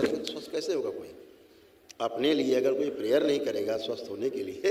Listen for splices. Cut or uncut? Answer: uncut